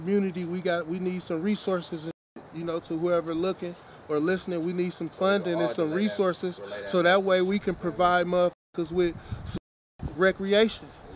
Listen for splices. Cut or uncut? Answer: uncut